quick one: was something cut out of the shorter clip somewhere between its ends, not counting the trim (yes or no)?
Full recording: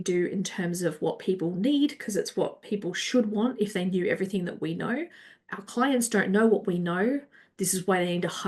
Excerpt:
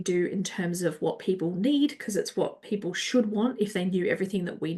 no